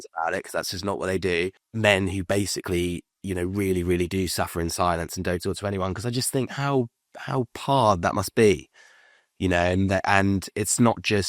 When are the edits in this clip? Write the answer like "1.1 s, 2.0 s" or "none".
1.6 s